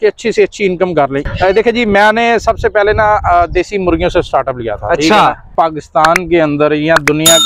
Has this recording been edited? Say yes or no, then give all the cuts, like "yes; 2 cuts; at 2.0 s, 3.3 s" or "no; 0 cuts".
yes; 2 cuts; at 1.2 s, 5.5 s